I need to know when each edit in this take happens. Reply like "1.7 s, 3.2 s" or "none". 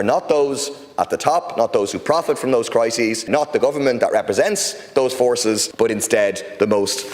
3.3 s, 5.7 s